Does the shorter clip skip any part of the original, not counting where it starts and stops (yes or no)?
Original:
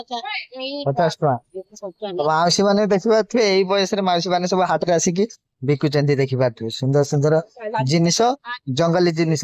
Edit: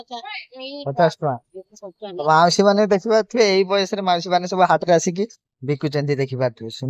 no